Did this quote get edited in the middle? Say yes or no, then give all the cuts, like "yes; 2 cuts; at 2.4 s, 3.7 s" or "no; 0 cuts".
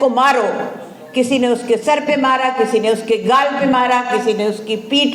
no; 0 cuts